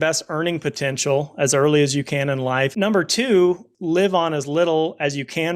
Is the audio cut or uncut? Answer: cut